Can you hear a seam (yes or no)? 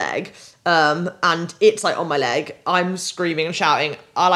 no